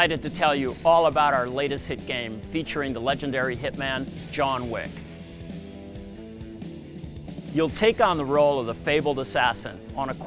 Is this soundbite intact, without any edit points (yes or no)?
no